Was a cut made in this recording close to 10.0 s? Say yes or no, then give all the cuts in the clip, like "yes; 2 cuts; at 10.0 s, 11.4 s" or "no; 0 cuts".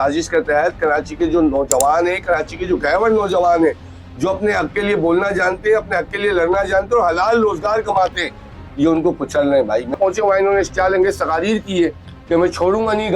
yes; 1 cut; at 10.0 s